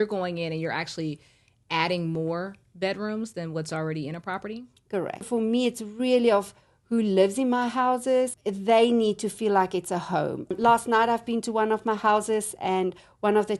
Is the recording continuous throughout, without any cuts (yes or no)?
no